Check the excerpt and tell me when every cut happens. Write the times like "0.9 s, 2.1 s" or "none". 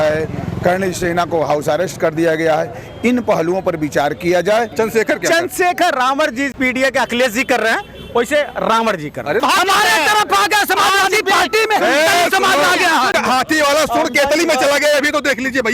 4.7 s, 6.5 s, 9.4 s, 13.1 s